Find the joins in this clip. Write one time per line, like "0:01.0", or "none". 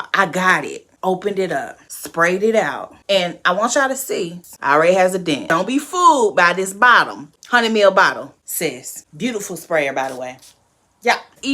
0:04.4
0:05.4